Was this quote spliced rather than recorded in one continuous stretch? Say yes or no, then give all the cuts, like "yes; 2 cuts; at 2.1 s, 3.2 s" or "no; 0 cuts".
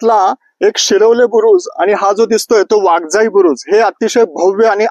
no; 0 cuts